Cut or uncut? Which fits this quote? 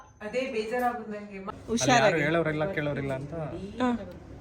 cut